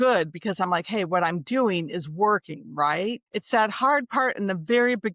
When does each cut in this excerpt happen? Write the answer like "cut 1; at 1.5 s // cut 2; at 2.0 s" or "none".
cut 1; at 3.3 s